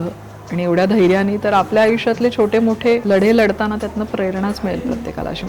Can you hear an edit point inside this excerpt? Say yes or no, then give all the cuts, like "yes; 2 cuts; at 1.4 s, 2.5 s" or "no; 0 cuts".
yes; 1 cut; at 3.0 s